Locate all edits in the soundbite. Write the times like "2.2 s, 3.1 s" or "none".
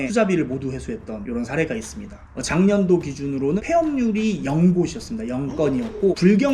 2.4 s